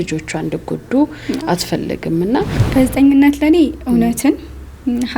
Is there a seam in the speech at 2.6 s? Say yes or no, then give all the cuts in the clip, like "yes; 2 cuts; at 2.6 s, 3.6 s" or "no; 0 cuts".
yes; 1 cut; at 2.6 s